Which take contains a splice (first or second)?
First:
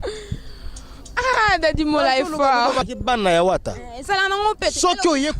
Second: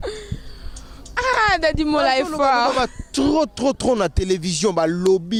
first